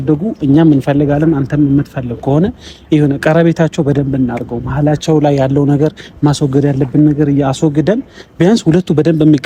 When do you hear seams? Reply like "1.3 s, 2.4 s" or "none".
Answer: none